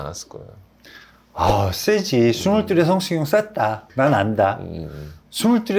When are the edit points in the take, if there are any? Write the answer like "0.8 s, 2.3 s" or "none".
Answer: 3.8 s

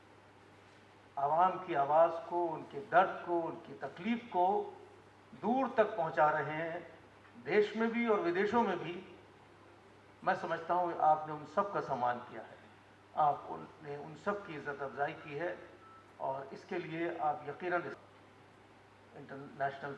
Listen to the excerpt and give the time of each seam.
17.9 s

